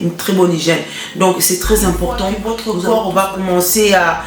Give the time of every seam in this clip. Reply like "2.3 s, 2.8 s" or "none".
2.4 s

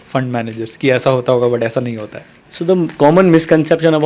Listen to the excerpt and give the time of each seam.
none

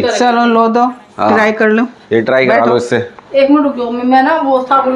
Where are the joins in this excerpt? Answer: 3.2 s

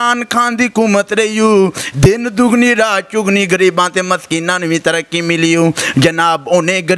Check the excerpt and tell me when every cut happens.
none

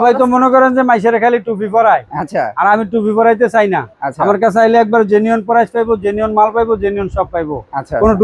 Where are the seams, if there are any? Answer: none

